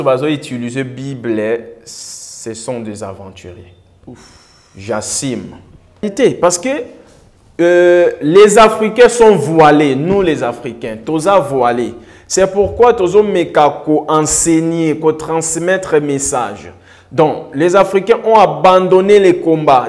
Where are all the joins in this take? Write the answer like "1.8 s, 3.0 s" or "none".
6.0 s